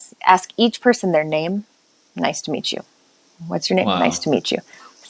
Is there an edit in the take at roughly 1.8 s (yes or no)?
no